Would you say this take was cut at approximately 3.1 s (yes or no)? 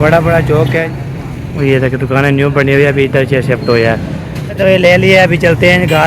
no